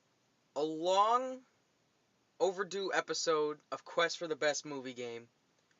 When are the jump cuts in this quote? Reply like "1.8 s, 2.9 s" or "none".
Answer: 3.9 s